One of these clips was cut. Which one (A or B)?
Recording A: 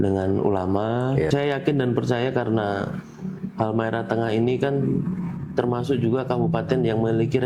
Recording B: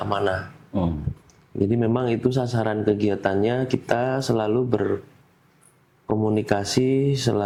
A